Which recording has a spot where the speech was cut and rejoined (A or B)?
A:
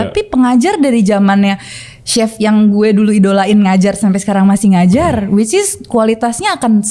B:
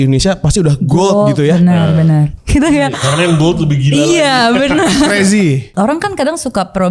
B